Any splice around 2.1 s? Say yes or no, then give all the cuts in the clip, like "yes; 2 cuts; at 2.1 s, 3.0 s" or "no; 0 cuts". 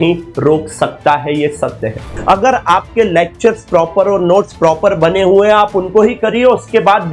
yes; 1 cut; at 2.1 s